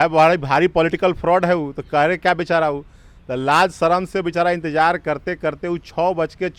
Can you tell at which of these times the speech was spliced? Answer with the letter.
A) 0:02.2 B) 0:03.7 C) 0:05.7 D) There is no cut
D